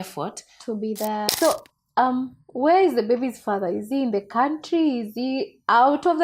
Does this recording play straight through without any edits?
no; 1 cut; at 1.3 s

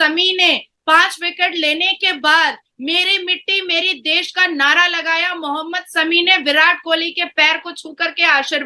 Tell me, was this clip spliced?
no; 0 cuts

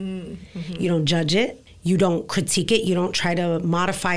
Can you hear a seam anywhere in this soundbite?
yes; 1 cut; at 1.7 s

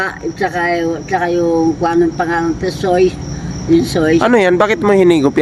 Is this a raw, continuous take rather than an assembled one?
yes; 0 cuts

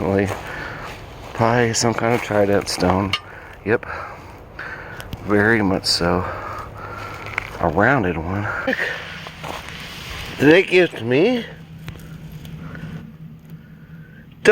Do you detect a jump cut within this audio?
yes; 1 cut; at 8.7 s

